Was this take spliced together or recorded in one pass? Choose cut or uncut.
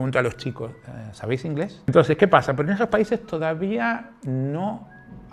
cut